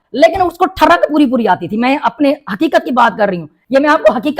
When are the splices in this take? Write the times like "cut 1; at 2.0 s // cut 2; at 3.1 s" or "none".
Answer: cut 1; at 3.5 s